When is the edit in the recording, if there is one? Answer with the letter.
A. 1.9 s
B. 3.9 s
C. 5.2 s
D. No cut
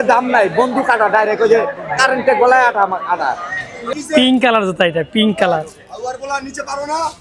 B